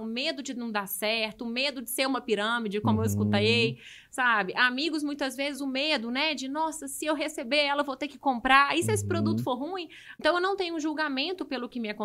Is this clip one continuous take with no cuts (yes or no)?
no